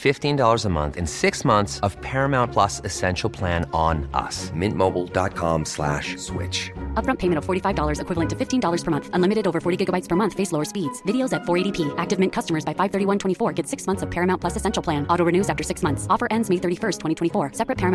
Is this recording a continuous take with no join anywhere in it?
yes; 0 cuts

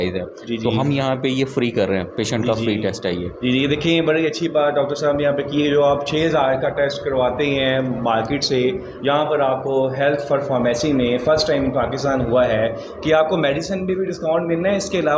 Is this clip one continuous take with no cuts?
yes; 0 cuts

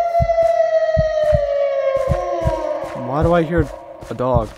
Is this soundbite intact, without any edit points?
yes; 0 cuts

